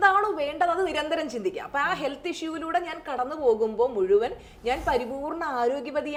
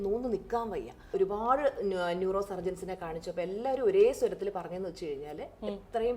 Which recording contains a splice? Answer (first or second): second